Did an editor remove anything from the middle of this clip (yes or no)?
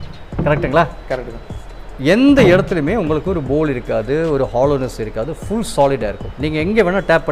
no